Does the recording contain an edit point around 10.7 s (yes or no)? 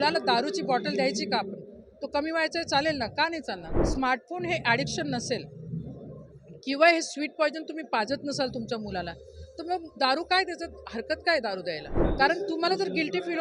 no